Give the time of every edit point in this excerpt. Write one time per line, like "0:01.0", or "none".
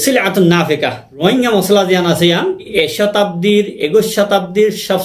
0:01.2
0:02.7

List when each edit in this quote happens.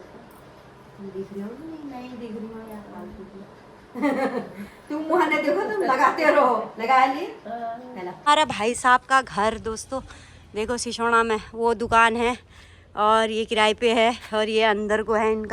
0:08.1

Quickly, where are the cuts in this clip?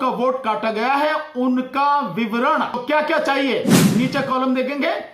0:02.8

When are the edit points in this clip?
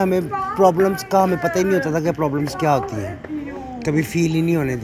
none

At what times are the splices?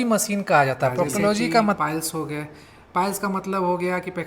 0:01.8

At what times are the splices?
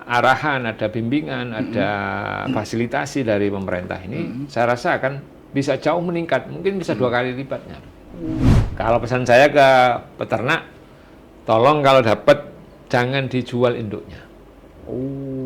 0:08.5

